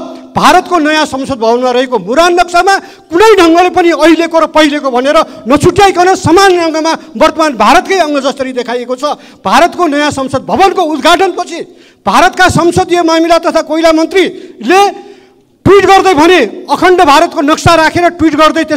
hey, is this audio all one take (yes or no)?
yes